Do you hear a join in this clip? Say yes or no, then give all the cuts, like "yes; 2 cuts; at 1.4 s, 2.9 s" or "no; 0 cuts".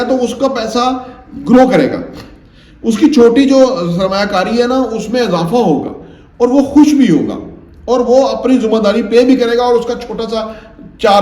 no; 0 cuts